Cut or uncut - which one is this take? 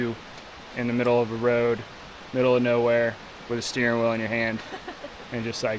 uncut